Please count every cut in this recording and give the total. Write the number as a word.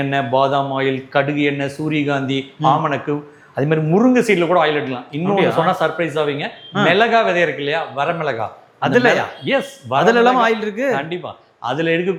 zero